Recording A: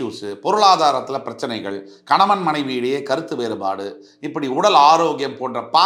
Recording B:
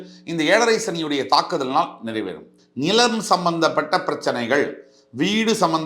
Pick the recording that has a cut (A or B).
B